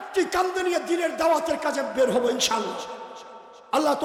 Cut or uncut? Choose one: uncut